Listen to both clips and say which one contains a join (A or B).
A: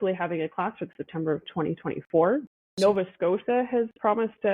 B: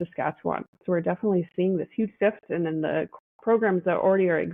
A